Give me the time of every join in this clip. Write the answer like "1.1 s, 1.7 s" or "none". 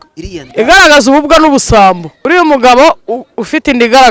2.1 s